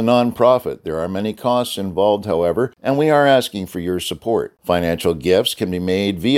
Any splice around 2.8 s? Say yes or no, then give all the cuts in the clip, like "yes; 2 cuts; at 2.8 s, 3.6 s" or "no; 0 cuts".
yes; 1 cut; at 2.8 s